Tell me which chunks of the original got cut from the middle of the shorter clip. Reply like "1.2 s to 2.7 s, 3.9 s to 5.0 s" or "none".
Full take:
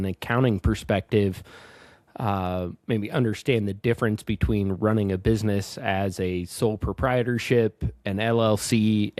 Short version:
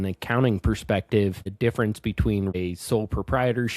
1.5 s to 3.7 s, 4.8 s to 6.3 s